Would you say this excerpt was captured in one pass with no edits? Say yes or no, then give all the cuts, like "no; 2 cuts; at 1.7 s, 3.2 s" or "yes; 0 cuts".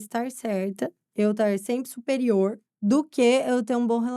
no; 2 cuts; at 1.0 s, 2.7 s